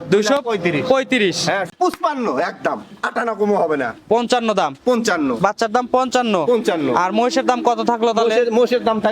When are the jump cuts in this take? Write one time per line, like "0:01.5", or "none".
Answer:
0:01.6